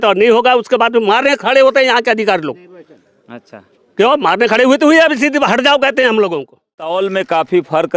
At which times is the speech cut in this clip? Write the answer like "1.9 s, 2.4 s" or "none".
6.8 s